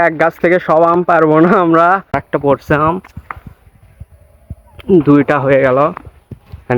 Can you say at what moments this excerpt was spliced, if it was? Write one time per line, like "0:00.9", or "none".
0:02.2